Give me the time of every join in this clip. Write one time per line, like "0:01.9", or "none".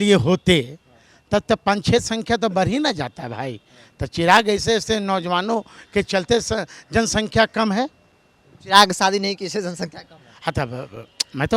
none